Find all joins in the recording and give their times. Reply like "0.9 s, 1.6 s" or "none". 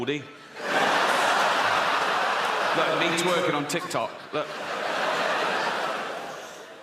5.8 s